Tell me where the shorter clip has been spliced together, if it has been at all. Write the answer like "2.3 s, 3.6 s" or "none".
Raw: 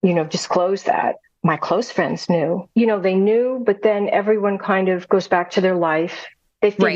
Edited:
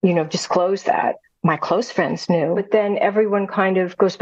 2.6 s